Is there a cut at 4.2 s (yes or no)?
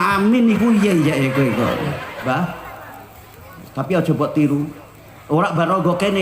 no